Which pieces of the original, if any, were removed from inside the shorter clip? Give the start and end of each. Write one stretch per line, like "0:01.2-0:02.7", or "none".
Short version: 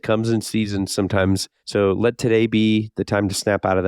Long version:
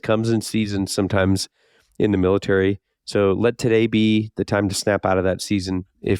0:01.5-0:03.0